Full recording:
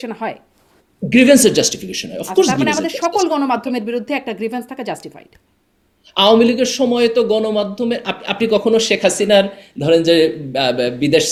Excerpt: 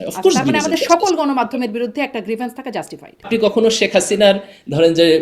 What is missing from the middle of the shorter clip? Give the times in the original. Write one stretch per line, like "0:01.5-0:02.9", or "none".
0:05.2-0:08.2